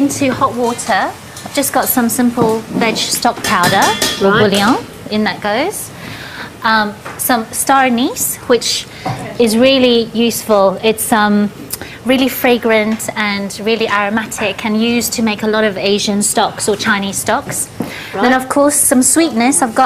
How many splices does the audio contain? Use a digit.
1